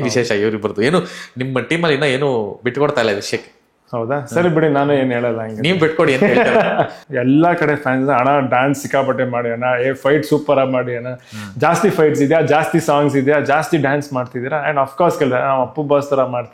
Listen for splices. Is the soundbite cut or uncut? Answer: cut